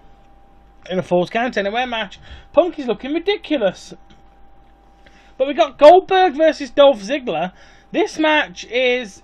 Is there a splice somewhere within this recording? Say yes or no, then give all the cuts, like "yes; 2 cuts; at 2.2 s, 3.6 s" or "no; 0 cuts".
yes; 1 cut; at 3.9 s